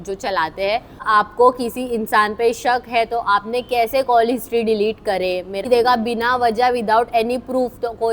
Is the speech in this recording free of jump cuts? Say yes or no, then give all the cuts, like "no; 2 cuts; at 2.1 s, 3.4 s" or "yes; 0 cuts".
no; 2 cuts; at 1.0 s, 5.6 s